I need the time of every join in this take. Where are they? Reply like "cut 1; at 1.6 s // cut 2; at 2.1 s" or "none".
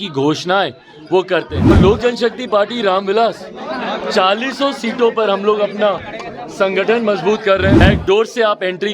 cut 1; at 1.7 s // cut 2; at 7.8 s